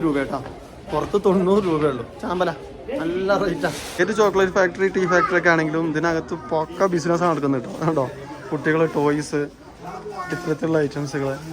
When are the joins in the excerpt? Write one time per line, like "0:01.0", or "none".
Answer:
none